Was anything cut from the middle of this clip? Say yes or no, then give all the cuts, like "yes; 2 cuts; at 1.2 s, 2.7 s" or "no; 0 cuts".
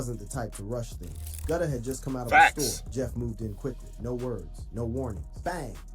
yes; 1 cut; at 2.8 s